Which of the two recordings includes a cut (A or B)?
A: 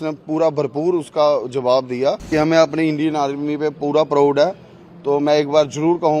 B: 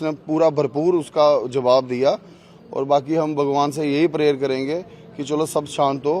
A